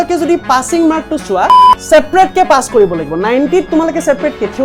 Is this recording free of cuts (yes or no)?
no